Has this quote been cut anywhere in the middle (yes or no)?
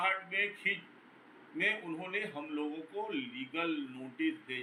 no